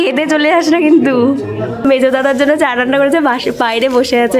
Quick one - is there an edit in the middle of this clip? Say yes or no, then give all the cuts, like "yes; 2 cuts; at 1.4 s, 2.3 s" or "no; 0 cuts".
yes; 1 cut; at 1.8 s